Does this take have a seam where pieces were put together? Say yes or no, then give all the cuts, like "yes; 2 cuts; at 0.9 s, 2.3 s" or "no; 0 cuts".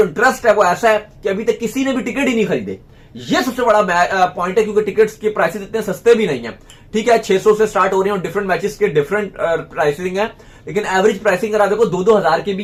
no; 0 cuts